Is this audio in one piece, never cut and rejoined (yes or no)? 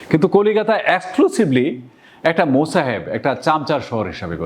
yes